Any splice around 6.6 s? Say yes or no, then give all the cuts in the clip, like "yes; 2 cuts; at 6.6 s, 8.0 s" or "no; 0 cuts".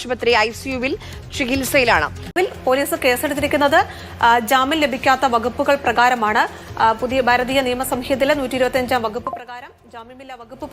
no; 1 cut; at 2.3 s